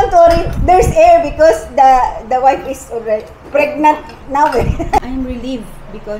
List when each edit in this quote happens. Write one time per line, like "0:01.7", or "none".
0:05.0